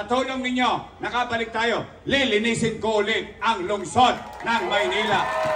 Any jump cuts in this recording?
no; 0 cuts

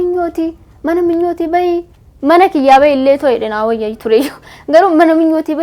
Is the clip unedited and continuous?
yes; 0 cuts

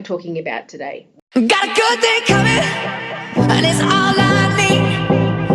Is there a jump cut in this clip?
yes; 1 cut; at 1.1 s

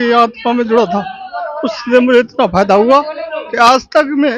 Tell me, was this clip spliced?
no; 0 cuts

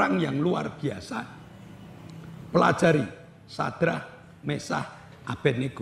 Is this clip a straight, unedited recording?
yes; 0 cuts

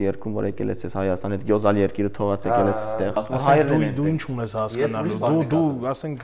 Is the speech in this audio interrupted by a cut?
yes; 1 cut; at 3.1 s

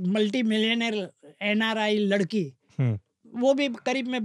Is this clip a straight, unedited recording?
no; 1 cut; at 3.2 s

